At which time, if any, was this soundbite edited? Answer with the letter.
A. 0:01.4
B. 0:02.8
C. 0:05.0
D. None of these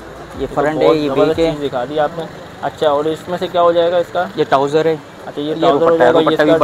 D